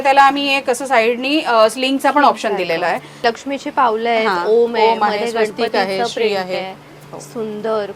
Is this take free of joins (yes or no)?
no